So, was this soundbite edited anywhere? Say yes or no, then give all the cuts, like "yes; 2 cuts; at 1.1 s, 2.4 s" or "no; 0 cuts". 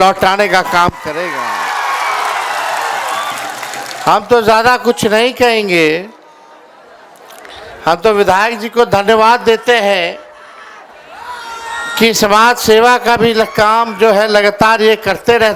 no; 0 cuts